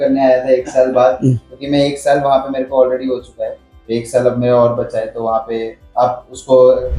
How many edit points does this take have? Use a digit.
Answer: 0